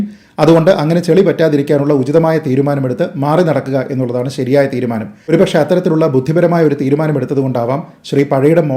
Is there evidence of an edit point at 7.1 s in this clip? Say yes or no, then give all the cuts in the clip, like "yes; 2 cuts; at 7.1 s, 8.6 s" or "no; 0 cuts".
no; 1 cut; at 5.3 s